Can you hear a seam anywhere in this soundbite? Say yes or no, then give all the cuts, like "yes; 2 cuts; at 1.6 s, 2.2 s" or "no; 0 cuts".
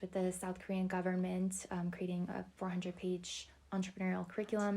no; 0 cuts